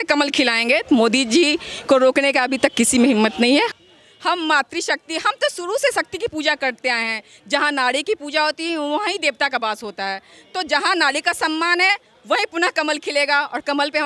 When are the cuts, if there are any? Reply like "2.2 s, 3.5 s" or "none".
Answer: 3.7 s